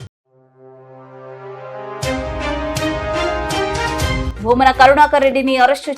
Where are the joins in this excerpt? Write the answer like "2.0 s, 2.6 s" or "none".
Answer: 4.3 s